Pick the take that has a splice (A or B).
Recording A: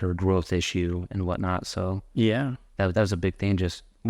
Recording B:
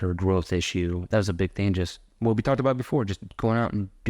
B